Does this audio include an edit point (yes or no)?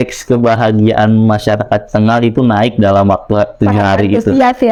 no